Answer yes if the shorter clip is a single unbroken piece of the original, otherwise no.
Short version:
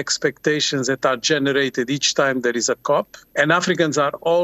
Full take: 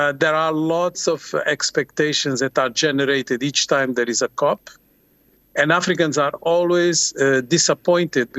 no